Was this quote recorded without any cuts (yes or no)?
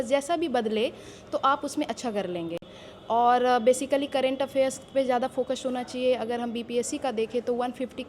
yes